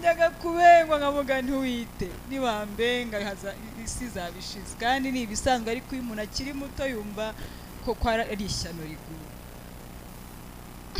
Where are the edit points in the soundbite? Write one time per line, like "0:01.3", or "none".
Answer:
none